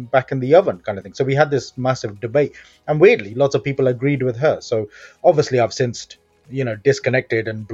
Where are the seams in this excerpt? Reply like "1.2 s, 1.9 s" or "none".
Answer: none